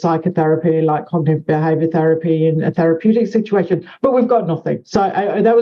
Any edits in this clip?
no; 0 cuts

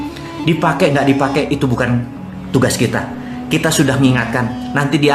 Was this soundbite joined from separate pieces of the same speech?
no; 0 cuts

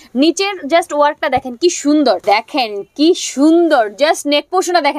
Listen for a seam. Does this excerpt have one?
yes; 1 cut; at 2.2 s

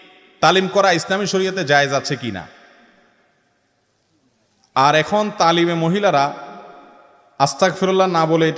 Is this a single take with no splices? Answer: yes; 0 cuts

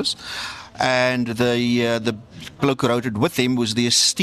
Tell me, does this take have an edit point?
no; 0 cuts

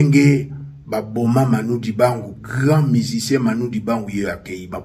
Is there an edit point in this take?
yes; 1 cut; at 2.3 s

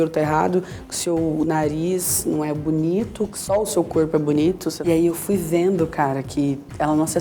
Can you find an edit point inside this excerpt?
yes; 2 cuts; at 3.4 s, 4.7 s

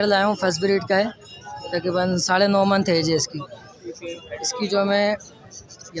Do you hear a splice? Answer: no; 0 cuts

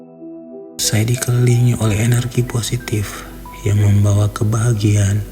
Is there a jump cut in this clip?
yes; 1 cut; at 0.9 s

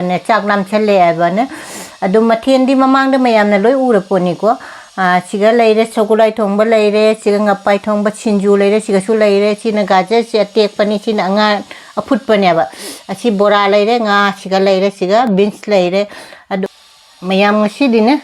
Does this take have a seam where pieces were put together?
yes; 1 cut; at 16.8 s

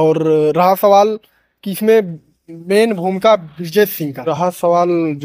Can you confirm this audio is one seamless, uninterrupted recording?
no; 1 cut; at 4.3 s

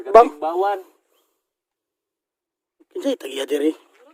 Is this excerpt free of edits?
yes; 0 cuts

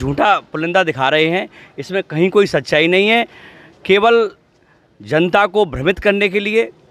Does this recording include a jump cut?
no; 0 cuts

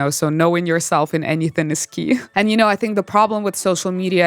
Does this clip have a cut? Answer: yes; 1 cut; at 2.3 s

